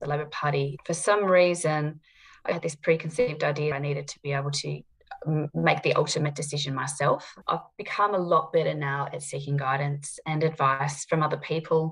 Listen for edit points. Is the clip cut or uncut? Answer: cut